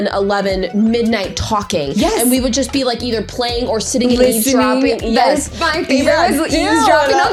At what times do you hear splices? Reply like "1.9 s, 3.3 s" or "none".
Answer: none